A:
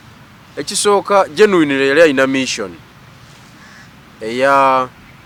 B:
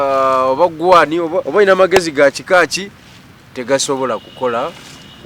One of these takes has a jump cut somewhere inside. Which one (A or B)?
B